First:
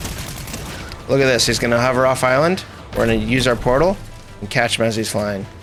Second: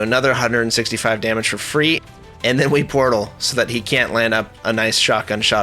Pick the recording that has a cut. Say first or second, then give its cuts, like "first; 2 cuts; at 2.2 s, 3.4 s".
second; 1 cut; at 2.0 s